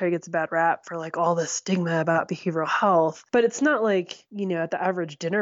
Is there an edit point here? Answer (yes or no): yes